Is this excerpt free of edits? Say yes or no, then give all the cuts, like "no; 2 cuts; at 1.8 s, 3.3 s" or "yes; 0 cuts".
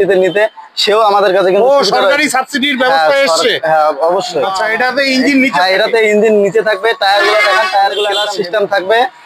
no; 2 cuts; at 4.5 s, 8.2 s